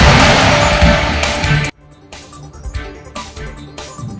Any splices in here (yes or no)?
yes